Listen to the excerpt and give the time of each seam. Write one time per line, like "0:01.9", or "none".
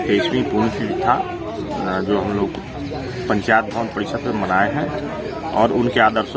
none